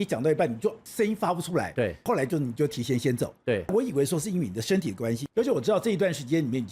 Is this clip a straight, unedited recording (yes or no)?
no